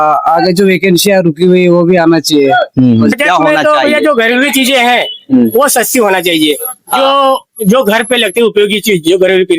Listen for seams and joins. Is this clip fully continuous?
no; 1 cut; at 3.1 s

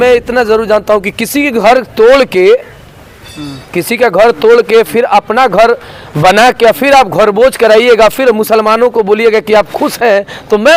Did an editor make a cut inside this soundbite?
no; 0 cuts

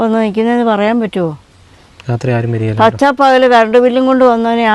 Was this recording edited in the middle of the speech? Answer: no; 0 cuts

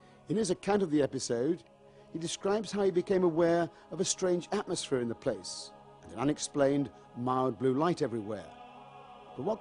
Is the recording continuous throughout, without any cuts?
yes; 0 cuts

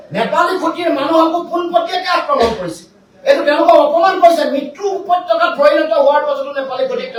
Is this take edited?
no; 0 cuts

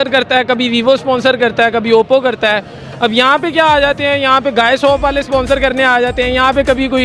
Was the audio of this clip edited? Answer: no; 0 cuts

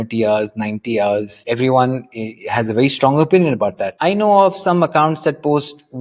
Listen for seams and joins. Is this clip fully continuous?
no; 2 cuts; at 1.4 s, 3.9 s

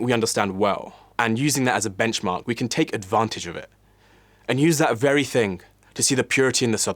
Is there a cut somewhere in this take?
yes; 1 cut; at 1.0 s

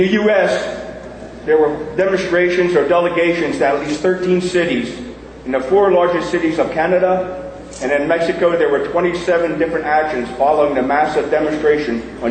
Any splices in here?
yes; 1 cut; at 10.9 s

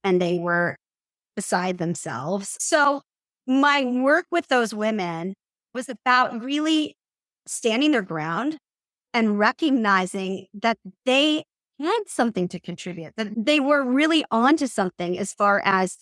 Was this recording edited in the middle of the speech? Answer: yes; 4 cuts; at 2.5 s, 5.8 s, 7.4 s, 13.3 s

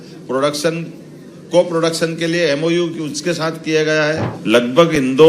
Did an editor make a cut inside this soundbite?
yes; 1 cut; at 4.3 s

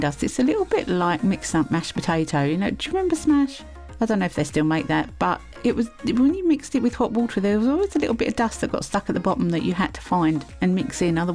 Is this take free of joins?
yes; 0 cuts

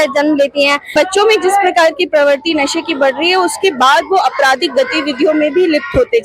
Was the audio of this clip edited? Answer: yes; 1 cut; at 0.9 s

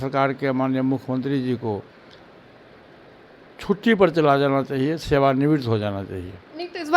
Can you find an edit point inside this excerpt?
no; 0 cuts

